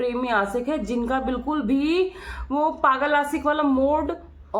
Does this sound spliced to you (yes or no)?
no